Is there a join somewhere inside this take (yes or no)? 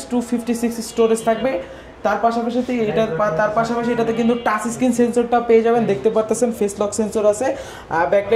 no